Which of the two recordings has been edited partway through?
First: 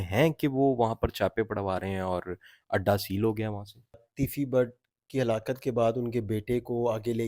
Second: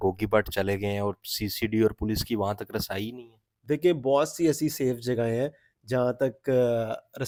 first; 1 cut; at 4.0 s

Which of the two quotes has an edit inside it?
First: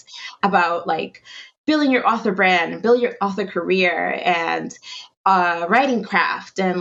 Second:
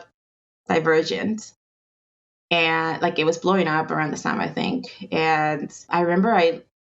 second; 1 cut; at 5.8 s

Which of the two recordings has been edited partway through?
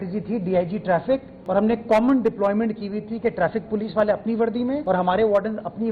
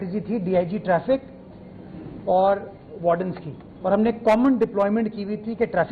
first; 2 cuts; at 1.3 s, 4.8 s

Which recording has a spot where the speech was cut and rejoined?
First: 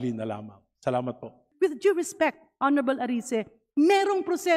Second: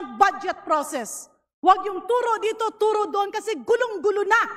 first; 1 cut; at 1.4 s

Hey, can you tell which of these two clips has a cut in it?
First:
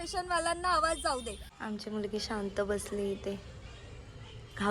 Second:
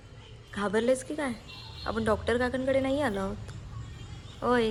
first; 1 cut; at 1.7 s

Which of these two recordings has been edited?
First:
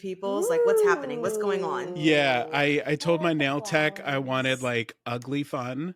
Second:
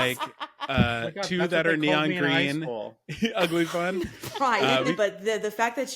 second; 1 cut; at 4.9 s

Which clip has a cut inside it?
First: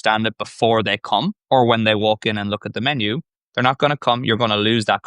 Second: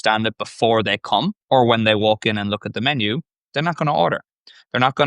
first; 1 cut; at 3.3 s

